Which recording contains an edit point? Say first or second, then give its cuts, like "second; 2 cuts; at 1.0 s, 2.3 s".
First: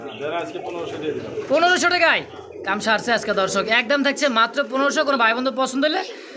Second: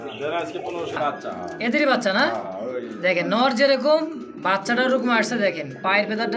second; 1 cut; at 1.0 s